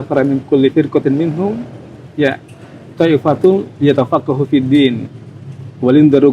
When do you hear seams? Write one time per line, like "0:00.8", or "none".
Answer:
none